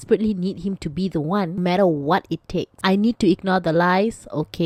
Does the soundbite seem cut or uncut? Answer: uncut